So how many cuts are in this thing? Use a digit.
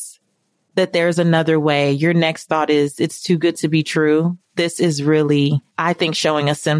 1